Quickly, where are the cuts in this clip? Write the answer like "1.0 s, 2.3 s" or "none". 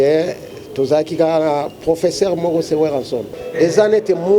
3.4 s

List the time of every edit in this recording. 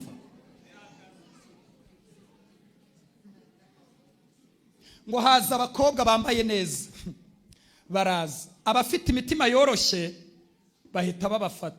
none

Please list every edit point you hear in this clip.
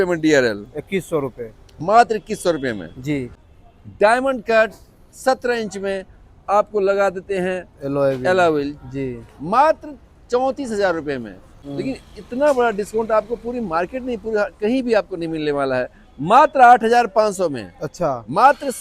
3.3 s, 11.6 s

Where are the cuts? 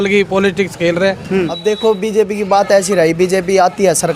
1.5 s

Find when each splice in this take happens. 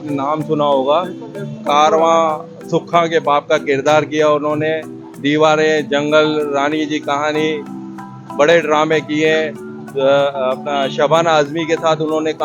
none

